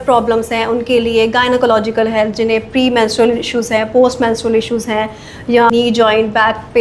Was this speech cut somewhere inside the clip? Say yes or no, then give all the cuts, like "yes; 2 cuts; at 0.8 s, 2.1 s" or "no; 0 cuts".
yes; 1 cut; at 5.7 s